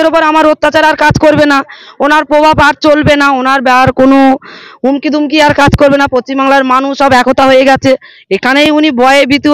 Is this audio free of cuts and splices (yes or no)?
yes